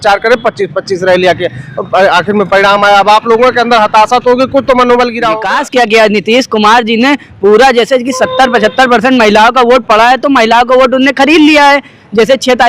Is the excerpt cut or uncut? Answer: cut